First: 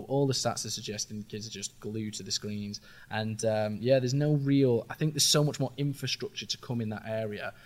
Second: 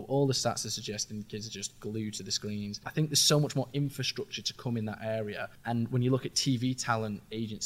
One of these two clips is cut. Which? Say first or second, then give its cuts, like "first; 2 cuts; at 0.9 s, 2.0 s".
second; 2 cuts; at 2.9 s, 5.5 s